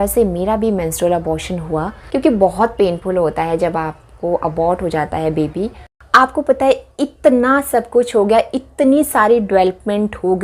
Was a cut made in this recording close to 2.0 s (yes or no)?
yes